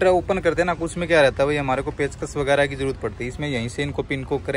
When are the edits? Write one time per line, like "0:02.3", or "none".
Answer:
none